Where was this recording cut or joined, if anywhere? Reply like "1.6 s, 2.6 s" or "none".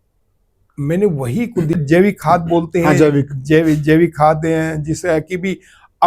1.8 s